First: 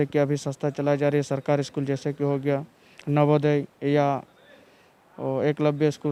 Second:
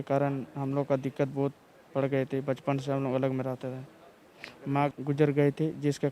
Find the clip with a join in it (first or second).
second